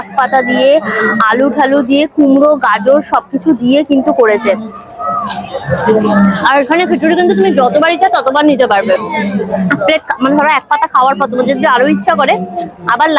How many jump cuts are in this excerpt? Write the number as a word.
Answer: zero